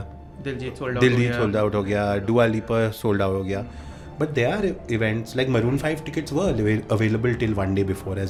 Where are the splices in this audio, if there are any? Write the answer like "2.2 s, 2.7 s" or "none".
none